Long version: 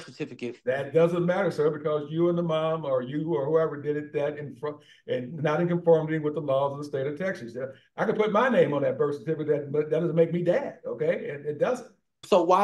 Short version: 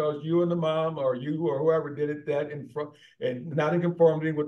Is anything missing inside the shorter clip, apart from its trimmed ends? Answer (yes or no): no